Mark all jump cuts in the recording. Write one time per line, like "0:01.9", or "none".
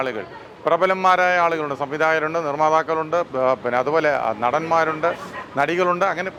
none

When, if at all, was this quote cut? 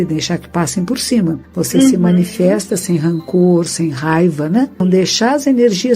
0:01.5
0:04.8

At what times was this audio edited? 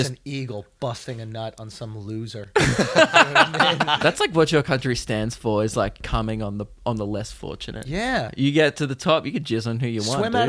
0:04.0
0:06.0
0:08.3

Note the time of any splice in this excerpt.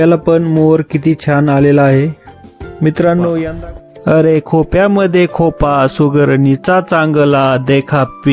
0:03.5

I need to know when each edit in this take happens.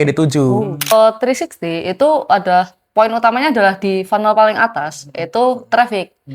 0:00.9

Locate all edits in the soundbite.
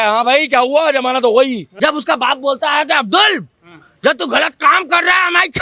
0:01.7

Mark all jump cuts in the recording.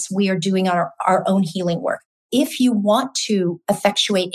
0:02.1

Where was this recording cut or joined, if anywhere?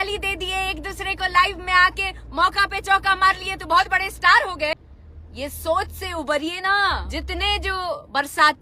0:04.7
0:07.1

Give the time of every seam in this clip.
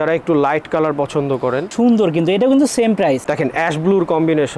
0:01.7
0:03.3

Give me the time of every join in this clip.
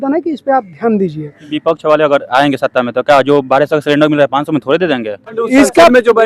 0:01.5
0:05.4

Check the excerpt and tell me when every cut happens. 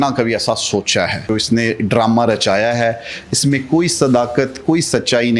0:01.2

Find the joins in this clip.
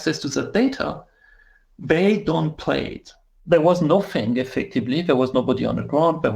0:03.4

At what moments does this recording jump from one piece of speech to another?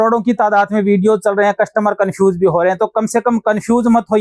none

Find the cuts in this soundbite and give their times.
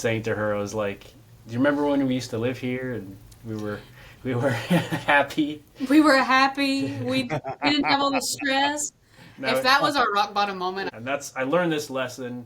0:10.9

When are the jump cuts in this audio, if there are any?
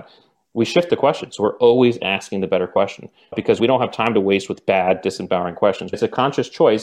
0:03.6
0:05.9

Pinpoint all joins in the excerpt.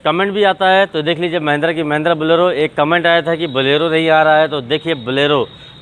none

